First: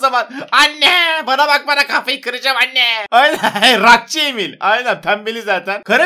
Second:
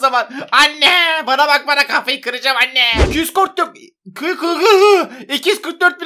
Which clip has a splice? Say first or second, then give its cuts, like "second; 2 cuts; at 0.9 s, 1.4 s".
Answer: second; 1 cut; at 3.1 s